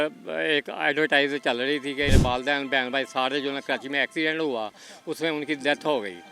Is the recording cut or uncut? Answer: cut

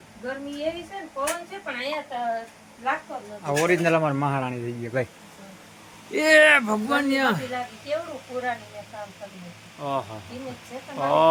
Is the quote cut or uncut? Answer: uncut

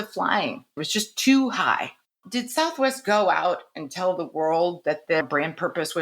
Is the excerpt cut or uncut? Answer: cut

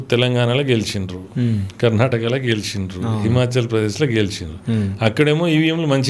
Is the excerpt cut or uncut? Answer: uncut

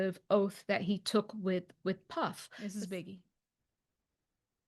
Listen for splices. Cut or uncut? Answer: cut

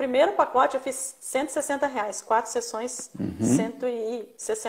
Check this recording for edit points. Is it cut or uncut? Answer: uncut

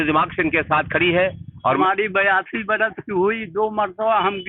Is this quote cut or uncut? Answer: cut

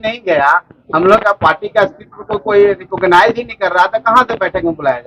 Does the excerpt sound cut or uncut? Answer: uncut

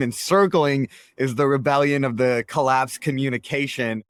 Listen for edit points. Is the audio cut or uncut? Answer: uncut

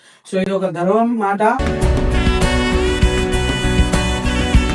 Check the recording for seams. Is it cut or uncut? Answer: uncut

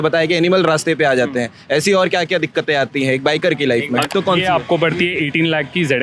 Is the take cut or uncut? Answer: cut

